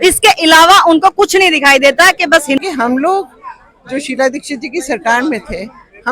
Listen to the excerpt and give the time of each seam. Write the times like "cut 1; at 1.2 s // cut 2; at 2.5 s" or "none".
cut 1; at 2.6 s